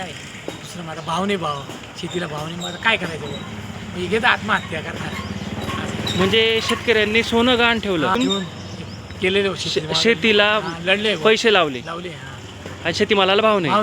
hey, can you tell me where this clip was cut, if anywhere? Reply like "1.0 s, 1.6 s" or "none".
8.2 s